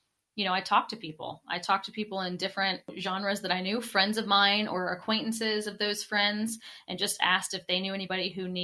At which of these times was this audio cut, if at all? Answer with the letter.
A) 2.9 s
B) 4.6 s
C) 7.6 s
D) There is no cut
A